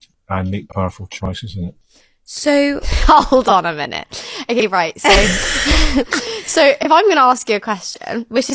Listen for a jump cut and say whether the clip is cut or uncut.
uncut